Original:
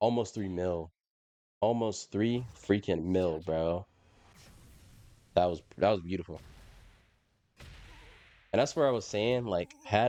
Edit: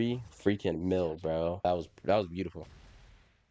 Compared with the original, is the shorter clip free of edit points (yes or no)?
no